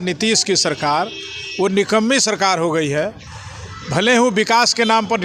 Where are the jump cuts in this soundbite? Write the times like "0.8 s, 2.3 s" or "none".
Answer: none